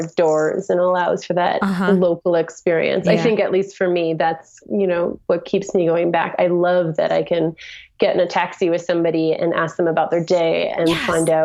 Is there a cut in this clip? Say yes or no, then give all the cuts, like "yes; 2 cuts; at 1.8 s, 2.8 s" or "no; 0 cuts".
no; 0 cuts